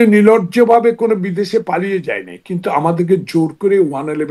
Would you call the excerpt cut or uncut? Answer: uncut